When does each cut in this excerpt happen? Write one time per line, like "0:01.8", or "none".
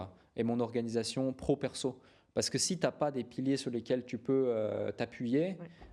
none